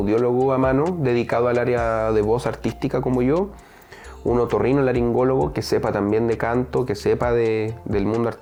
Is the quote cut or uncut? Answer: uncut